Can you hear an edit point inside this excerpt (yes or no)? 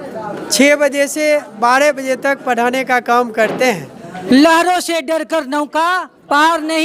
yes